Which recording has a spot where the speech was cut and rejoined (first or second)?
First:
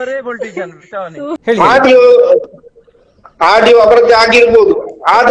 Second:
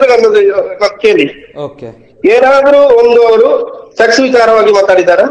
first